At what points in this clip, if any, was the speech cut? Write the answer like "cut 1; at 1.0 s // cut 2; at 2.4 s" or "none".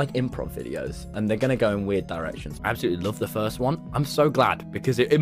cut 1; at 2.4 s